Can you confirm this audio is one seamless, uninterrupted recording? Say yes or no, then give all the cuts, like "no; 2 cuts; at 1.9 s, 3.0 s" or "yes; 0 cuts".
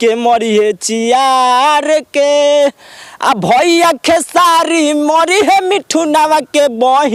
yes; 0 cuts